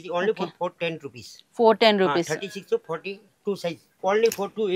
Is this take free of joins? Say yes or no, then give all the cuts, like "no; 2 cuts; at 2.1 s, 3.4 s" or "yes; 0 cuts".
no; 1 cut; at 3.9 s